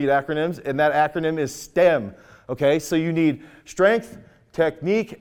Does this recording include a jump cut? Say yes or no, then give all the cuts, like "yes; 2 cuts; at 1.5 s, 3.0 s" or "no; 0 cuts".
no; 0 cuts